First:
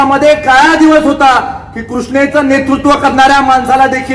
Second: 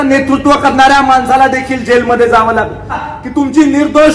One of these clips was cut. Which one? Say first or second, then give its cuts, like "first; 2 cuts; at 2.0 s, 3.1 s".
second; 1 cut; at 3.1 s